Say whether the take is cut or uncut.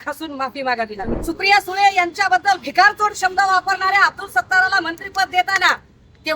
cut